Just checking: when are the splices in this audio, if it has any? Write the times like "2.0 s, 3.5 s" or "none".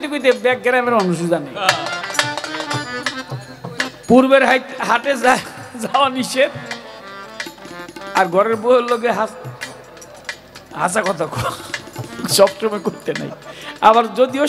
none

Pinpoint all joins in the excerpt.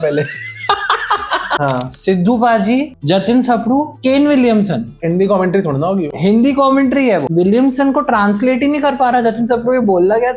1.5 s, 3.9 s, 4.9 s, 7.3 s

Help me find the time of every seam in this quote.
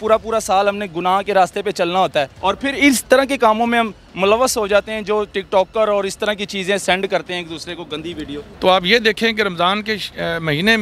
2.3 s, 8.5 s

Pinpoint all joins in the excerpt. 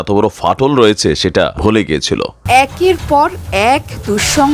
1.5 s, 2.4 s

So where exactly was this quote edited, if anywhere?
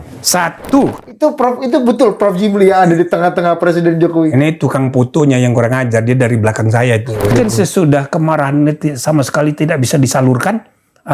1.0 s, 7.3 s

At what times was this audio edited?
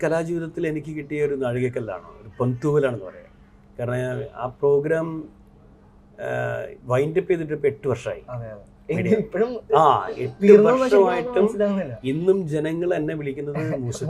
none

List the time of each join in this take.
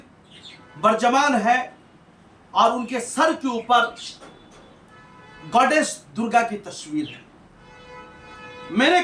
none

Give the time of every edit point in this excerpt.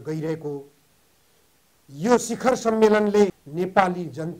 3.4 s

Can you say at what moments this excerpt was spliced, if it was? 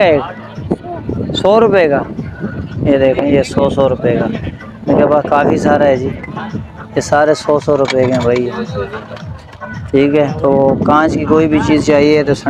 none

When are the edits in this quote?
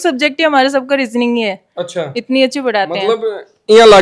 none

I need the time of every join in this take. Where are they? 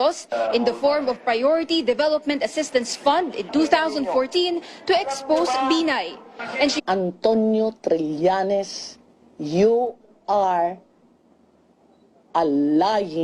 none

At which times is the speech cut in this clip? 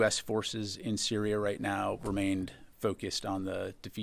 none

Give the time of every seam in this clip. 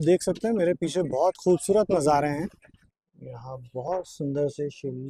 3.2 s

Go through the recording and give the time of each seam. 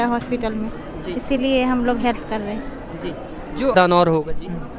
3.7 s

